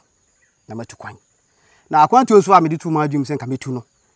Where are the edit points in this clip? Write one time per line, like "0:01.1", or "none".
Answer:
none

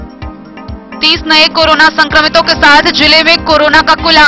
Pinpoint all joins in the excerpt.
0:01.0

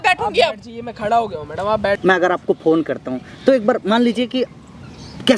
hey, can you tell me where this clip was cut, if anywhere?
0:02.0

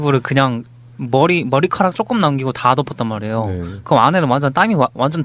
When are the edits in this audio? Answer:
0:02.0

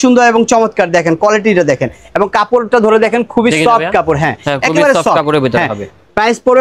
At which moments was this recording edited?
none

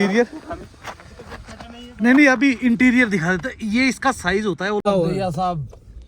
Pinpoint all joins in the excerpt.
0:04.8

